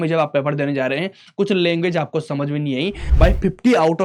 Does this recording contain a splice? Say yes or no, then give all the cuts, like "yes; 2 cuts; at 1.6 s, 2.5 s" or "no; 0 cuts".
yes; 1 cut; at 3.0 s